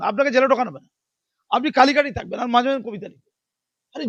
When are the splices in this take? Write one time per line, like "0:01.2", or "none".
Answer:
none